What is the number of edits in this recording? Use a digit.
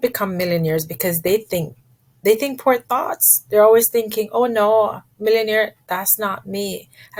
0